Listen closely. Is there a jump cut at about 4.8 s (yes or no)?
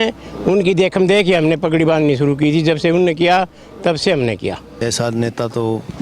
yes